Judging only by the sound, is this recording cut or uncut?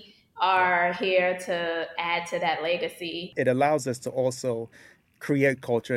cut